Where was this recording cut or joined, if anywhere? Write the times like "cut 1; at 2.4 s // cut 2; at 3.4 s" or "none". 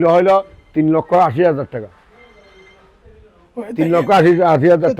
none